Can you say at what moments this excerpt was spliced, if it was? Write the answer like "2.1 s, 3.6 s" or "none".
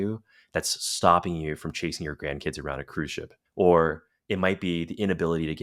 3.4 s

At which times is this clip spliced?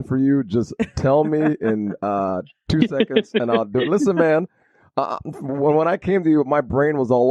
none

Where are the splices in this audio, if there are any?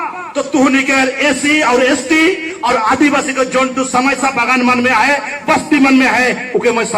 none

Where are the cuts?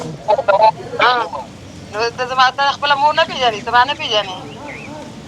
1.3 s

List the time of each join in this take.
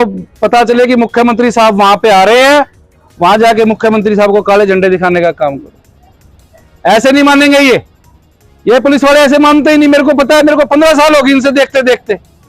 none

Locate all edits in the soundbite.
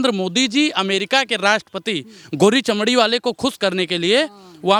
none

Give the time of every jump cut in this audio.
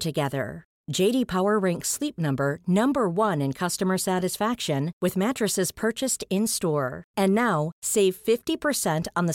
none

